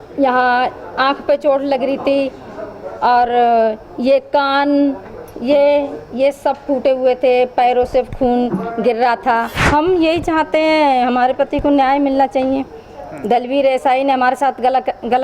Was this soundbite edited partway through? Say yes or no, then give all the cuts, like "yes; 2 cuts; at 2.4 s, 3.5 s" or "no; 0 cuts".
yes; 1 cut; at 9.6 s